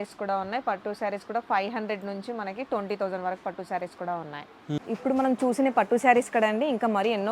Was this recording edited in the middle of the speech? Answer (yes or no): yes